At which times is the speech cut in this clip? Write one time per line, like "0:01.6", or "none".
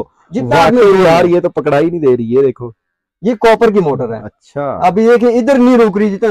none